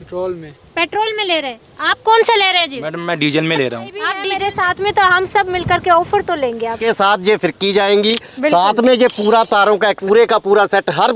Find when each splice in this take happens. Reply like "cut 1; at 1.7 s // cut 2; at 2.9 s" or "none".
cut 1; at 4.2 s // cut 2; at 6.8 s // cut 3; at 10.0 s